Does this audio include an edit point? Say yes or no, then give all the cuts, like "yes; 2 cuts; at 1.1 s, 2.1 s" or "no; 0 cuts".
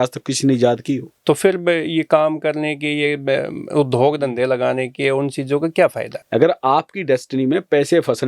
yes; 2 cuts; at 1.1 s, 6.1 s